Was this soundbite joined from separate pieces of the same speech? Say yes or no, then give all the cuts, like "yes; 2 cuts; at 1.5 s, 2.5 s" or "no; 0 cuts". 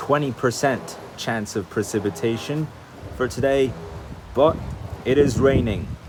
no; 0 cuts